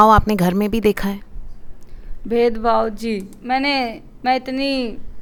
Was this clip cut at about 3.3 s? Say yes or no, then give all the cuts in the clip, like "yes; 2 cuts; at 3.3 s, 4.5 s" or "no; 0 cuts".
no; 0 cuts